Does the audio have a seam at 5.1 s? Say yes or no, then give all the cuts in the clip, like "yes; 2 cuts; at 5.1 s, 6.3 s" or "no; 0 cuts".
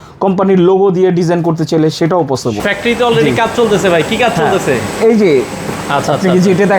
no; 1 cut; at 2.6 s